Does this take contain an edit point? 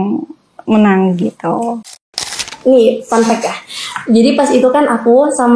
yes; 1 cut; at 2.4 s

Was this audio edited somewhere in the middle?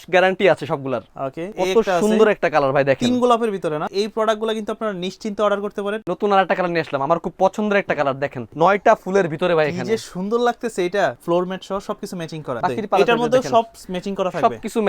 yes; 6 cuts; at 1.5 s, 3.9 s, 6.0 s, 8.4 s, 11.2 s, 12.6 s

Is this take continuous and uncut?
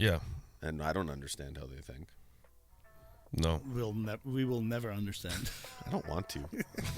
yes; 0 cuts

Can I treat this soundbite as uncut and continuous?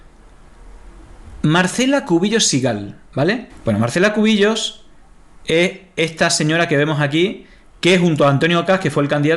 no; 1 cut; at 3.5 s

